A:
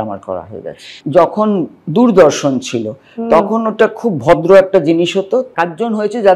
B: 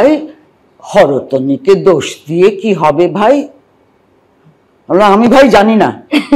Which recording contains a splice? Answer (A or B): A